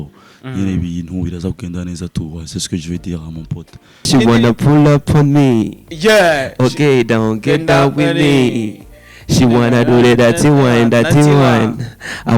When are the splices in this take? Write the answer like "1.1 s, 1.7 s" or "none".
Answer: 4.1 s